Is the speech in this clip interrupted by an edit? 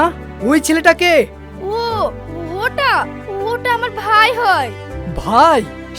no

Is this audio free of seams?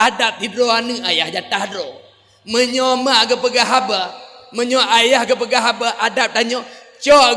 yes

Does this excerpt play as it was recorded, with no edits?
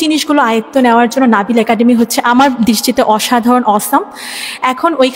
yes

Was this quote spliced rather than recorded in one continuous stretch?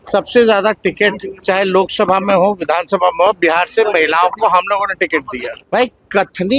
yes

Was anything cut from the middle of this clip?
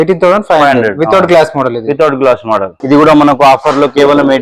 yes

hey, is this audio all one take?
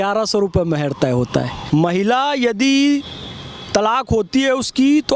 no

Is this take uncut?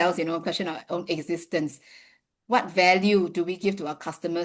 yes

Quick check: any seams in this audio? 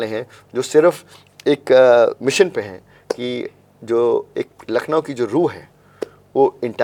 no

